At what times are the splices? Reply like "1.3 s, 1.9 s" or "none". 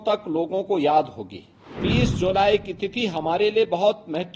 1.8 s